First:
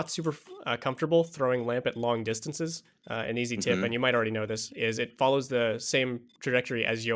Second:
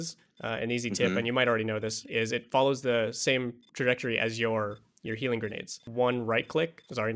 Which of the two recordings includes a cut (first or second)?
second